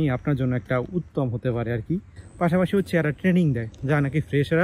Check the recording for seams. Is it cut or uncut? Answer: cut